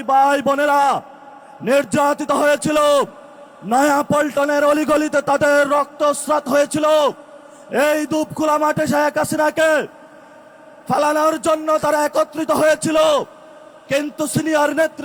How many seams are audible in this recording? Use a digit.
0